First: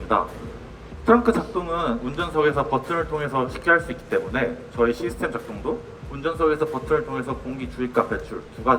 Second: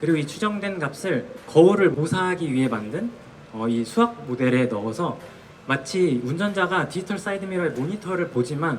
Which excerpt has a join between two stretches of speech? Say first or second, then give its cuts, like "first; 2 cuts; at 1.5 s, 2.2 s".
second; 2 cuts; at 1.5 s, 1.9 s